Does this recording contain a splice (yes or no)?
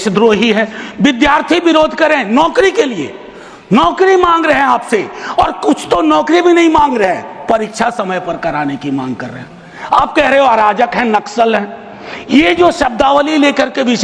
no